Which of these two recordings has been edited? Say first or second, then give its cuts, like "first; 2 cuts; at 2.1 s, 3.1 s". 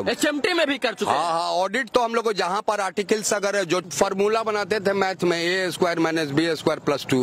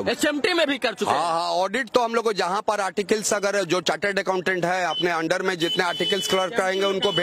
first; 1 cut; at 3.9 s